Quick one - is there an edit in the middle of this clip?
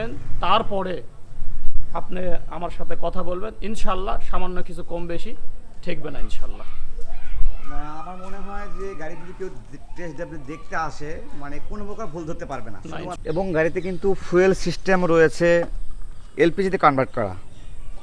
yes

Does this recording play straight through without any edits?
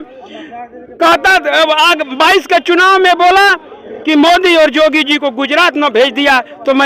yes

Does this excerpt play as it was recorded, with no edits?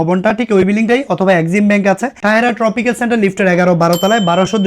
no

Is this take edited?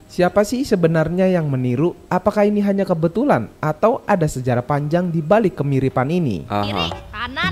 no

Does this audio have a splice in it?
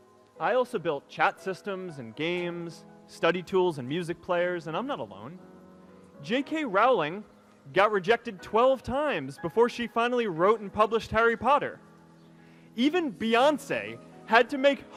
no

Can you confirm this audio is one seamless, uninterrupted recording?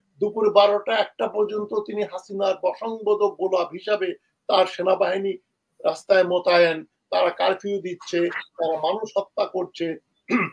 yes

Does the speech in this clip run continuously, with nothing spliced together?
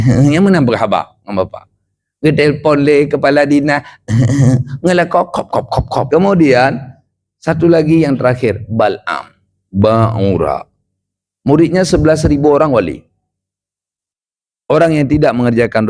no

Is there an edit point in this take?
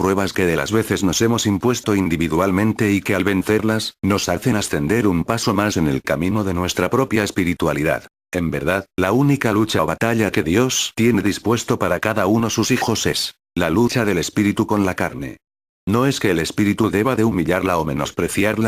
yes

